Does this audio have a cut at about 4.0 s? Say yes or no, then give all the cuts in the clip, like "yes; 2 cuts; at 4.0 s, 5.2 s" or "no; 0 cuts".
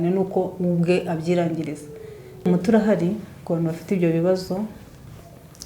no; 1 cut; at 2.5 s